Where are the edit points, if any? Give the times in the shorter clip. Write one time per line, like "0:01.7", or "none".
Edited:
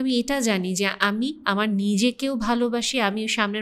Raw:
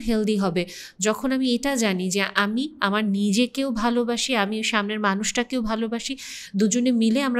none